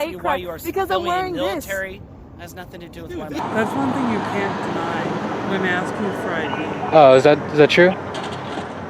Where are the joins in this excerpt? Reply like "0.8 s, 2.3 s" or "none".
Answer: 3.3 s